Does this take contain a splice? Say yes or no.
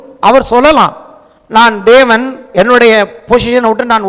no